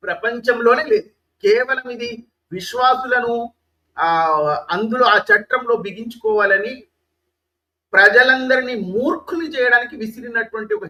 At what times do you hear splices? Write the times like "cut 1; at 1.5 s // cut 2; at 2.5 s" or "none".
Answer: none